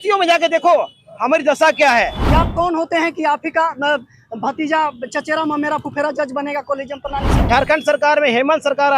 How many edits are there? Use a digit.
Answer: 2